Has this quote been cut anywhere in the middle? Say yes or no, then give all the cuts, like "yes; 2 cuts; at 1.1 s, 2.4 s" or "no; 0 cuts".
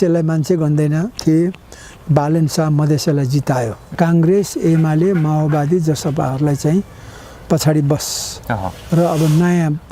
yes; 1 cut; at 3.8 s